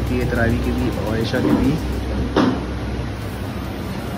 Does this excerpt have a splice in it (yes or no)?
no